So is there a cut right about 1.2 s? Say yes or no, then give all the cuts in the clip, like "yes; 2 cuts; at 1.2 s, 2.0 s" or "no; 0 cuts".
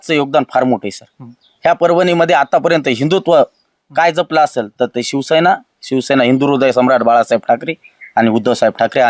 no; 0 cuts